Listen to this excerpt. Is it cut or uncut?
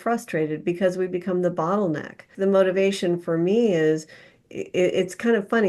cut